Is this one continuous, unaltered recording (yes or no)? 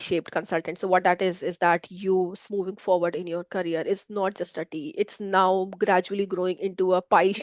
no